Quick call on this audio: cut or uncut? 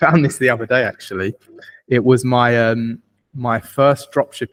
uncut